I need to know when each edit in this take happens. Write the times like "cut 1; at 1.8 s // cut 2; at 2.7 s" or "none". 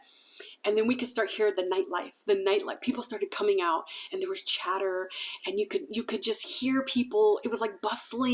none